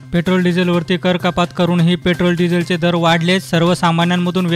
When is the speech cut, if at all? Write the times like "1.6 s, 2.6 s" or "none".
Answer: none